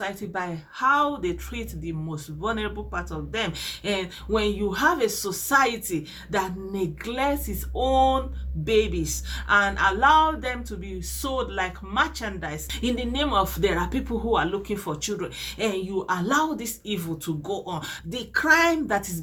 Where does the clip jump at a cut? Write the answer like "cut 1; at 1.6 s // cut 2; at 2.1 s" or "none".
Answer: cut 1; at 12.7 s // cut 2; at 17.9 s